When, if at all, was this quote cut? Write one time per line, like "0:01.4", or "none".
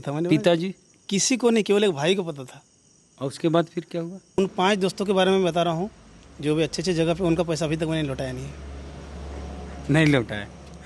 0:04.4